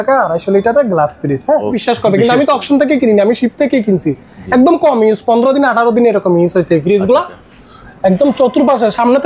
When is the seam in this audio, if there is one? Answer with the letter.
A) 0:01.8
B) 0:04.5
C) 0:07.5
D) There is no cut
A